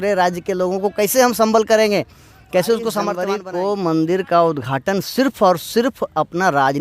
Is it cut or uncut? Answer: cut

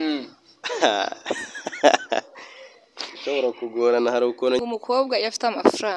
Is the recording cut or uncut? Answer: cut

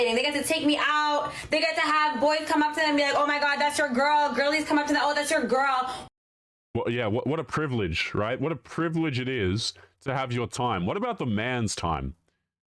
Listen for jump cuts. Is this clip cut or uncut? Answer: uncut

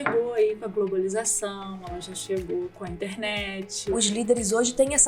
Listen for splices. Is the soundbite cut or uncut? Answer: cut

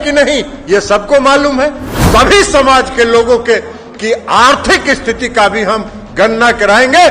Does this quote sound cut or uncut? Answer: cut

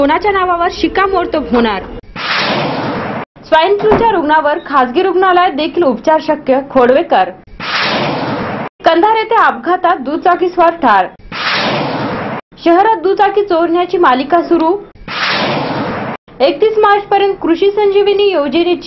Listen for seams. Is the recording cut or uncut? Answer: uncut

